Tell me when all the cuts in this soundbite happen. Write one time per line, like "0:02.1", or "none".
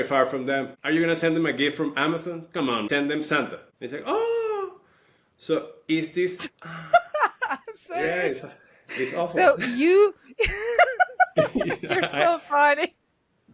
none